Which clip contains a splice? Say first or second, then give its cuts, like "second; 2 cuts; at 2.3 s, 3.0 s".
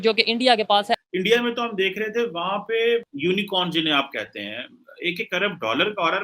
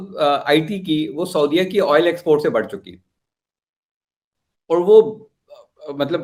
first; 2 cuts; at 1.0 s, 3.1 s